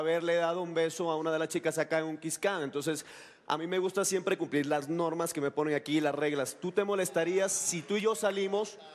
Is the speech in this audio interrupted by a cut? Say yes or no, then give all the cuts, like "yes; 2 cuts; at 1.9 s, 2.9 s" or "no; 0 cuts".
no; 0 cuts